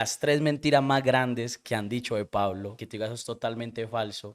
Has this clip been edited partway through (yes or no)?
no